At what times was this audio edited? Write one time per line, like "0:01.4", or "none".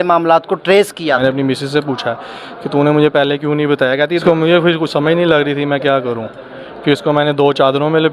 0:01.2
0:04.2